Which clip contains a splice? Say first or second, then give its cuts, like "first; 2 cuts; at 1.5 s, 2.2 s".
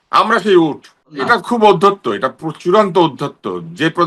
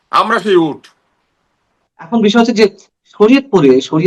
first; 1 cut; at 1.2 s